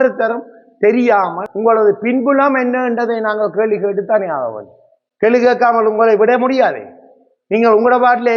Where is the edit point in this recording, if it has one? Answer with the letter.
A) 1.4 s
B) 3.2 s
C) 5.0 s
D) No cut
A